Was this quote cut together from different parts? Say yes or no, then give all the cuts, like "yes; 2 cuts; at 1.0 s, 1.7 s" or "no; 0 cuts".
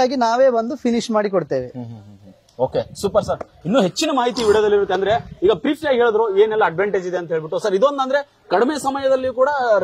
no; 0 cuts